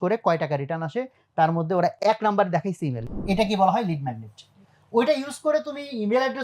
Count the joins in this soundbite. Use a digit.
2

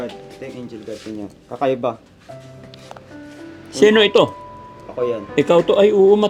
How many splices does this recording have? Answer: 0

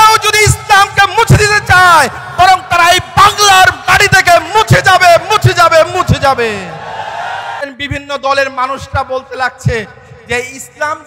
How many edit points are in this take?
1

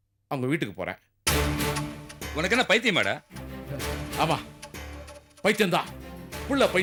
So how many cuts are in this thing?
0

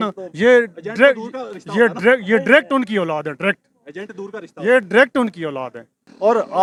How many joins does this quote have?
0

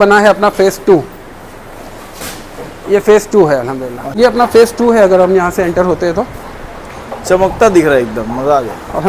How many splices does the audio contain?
1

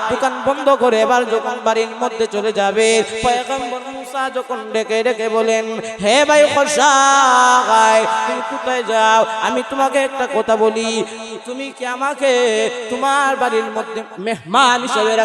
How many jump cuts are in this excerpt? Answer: 1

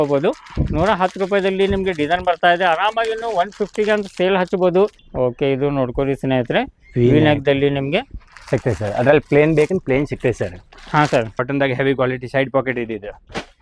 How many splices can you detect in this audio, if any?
2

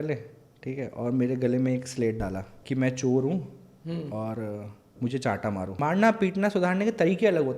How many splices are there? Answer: 2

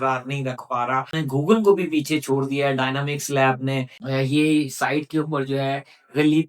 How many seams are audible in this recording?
2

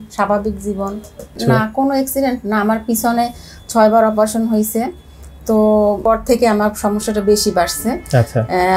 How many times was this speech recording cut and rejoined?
2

